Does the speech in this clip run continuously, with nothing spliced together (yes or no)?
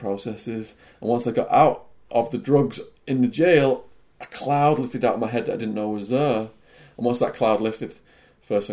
yes